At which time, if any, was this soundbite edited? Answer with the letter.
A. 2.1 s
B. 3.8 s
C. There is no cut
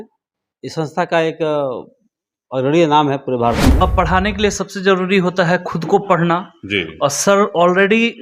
B